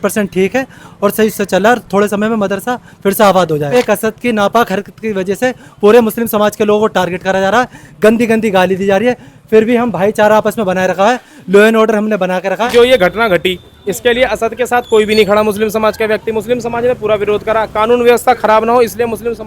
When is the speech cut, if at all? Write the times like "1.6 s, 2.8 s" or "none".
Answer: 3.7 s, 12.6 s